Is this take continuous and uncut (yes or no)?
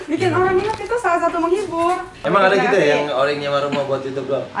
no